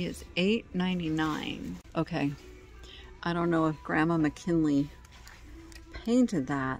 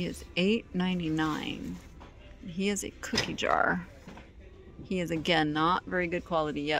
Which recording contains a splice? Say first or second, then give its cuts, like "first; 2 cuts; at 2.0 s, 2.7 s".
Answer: first; 1 cut; at 1.8 s